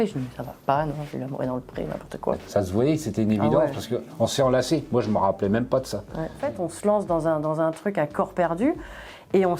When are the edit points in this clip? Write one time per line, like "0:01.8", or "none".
0:02.4
0:06.5